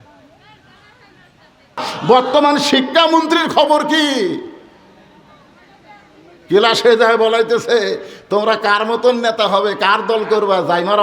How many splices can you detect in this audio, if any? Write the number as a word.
one